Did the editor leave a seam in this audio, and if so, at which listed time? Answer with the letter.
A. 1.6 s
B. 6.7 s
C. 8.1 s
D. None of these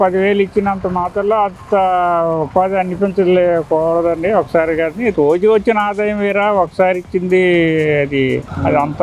D